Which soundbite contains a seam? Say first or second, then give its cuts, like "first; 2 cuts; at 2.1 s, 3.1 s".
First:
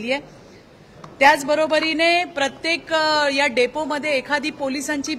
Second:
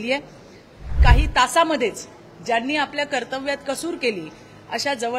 second; 1 cut; at 0.9 s